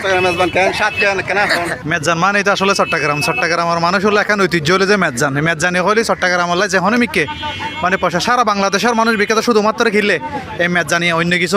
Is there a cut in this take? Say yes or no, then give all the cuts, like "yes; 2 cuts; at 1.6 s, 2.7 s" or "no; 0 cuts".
no; 0 cuts